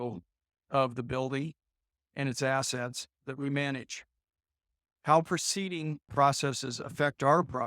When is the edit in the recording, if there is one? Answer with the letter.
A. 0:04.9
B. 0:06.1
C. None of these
B